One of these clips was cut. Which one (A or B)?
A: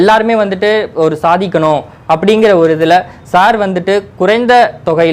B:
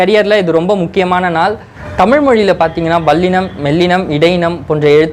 B